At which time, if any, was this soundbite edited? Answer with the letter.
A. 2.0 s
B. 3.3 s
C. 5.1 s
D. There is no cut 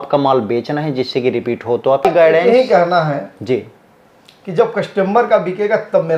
A